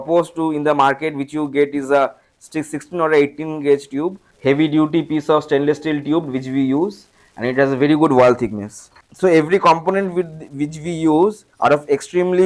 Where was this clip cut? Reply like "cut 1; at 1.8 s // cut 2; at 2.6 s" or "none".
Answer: cut 1; at 4.3 s // cut 2; at 9.0 s // cut 3; at 11.4 s